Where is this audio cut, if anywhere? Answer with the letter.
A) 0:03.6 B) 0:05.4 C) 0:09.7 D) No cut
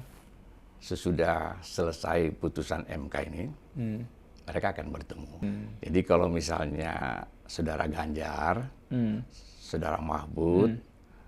B